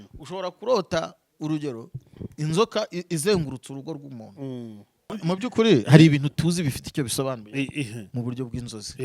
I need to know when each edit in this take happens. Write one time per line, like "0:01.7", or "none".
0:05.2

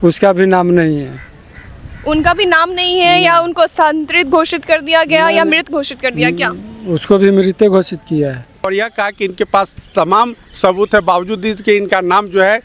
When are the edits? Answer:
0:08.6

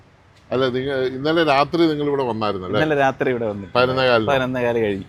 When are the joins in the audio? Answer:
none

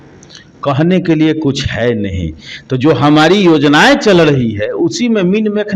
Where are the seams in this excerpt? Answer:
none

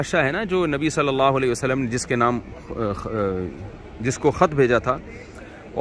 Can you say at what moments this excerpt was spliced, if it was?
none

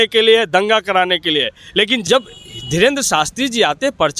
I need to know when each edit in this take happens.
0:02.0

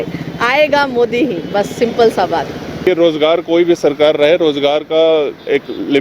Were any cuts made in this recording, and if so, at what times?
0:02.8

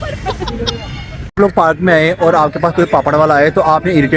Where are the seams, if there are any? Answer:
0:01.4

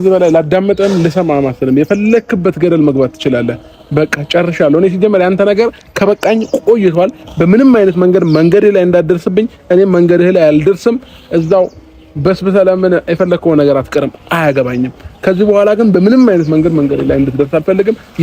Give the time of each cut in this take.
none

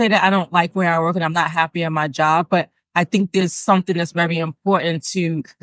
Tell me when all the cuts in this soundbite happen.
none

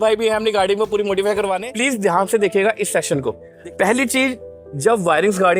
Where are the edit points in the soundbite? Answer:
0:01.7
0:03.5

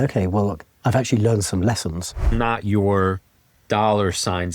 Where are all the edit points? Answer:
0:02.2

